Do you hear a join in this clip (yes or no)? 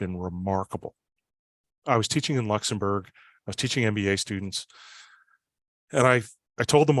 yes